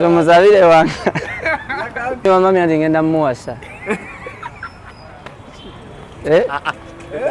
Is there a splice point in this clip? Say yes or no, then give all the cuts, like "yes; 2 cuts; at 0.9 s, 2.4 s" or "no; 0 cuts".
yes; 1 cut; at 2.2 s